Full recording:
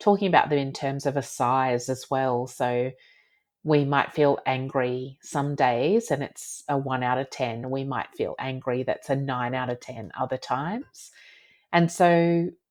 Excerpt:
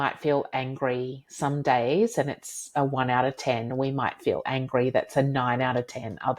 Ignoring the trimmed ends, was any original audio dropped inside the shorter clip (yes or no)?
no